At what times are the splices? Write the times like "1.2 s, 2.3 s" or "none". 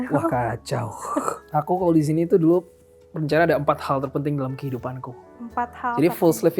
1.4 s